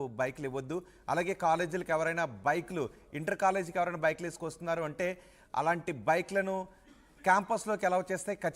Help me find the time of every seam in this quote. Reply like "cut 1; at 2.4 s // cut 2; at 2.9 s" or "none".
cut 1; at 1.8 s